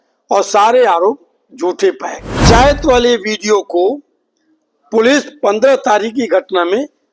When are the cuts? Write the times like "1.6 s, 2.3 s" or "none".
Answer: 2.4 s